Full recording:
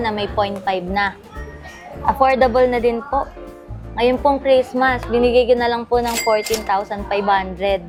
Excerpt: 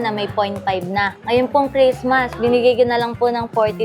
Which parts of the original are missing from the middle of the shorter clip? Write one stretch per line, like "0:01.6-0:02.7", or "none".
0:01.2-0:03.9